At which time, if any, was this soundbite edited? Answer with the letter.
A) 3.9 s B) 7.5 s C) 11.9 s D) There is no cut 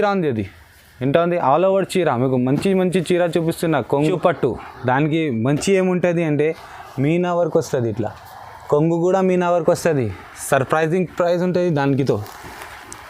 A